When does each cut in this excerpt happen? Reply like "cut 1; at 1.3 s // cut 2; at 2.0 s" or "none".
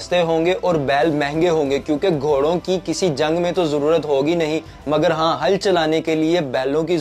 none